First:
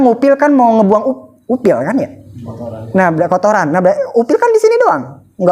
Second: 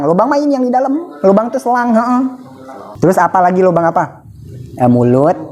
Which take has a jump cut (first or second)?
second